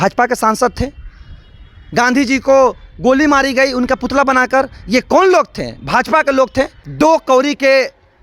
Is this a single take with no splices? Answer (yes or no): no